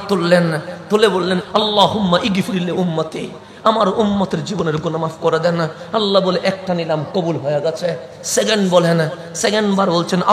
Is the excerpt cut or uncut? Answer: cut